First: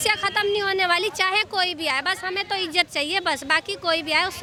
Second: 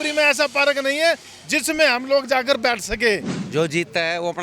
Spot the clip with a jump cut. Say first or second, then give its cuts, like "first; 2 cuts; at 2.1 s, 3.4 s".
second; 1 cut; at 3.4 s